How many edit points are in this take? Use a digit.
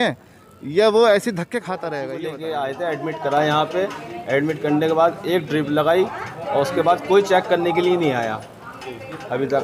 1